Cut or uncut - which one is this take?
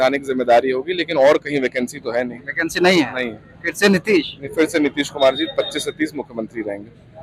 uncut